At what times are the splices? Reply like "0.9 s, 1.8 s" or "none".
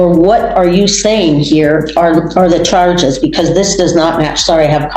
none